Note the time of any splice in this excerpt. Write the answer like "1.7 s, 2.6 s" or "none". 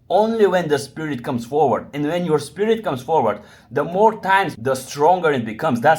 4.5 s